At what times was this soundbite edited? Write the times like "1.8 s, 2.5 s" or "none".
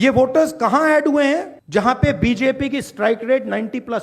1.6 s